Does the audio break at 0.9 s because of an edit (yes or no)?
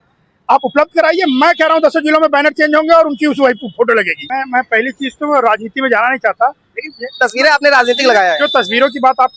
no